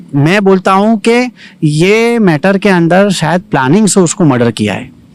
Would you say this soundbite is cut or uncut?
uncut